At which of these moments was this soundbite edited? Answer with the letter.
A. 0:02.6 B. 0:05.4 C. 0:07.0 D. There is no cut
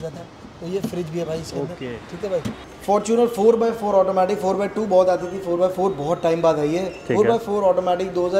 A